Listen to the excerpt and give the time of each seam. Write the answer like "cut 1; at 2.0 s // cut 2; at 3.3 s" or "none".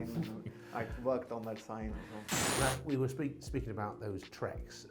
cut 1; at 2.6 s